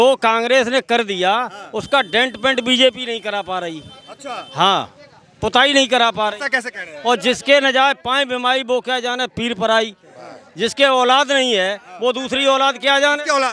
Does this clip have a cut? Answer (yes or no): no